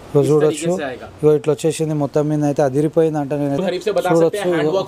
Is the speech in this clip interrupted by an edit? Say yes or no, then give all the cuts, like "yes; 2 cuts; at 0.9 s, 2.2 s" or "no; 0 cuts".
yes; 1 cut; at 3.6 s